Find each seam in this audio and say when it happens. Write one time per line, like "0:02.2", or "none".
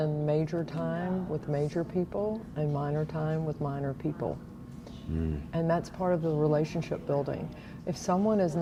none